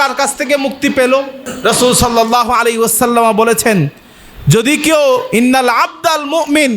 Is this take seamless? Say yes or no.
no